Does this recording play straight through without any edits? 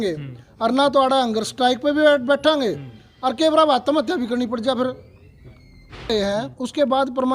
no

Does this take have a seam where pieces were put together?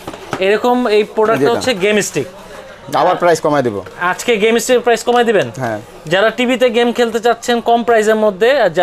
no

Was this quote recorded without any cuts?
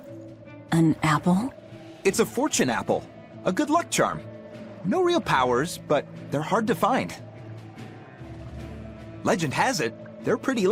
yes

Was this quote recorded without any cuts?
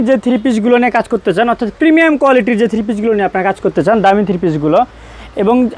yes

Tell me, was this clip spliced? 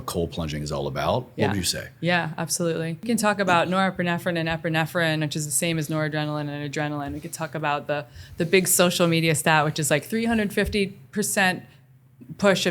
yes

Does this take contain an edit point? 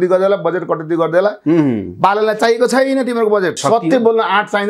yes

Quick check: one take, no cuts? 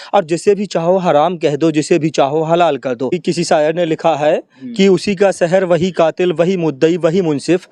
no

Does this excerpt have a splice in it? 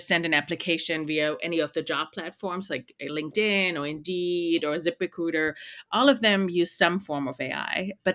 no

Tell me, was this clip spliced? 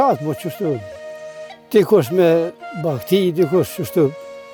no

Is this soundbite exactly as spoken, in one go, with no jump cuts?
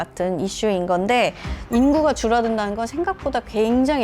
no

